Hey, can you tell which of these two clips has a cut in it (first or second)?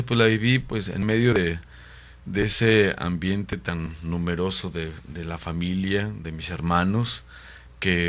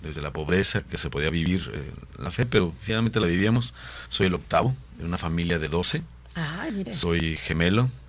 second